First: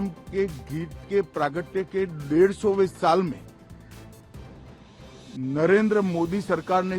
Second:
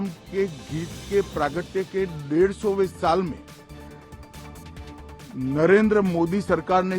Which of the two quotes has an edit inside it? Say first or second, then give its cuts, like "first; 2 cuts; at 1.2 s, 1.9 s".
first; 2 cuts; at 3.6 s, 5.3 s